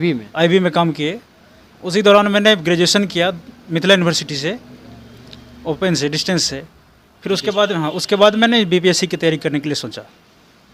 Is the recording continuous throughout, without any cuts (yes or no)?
yes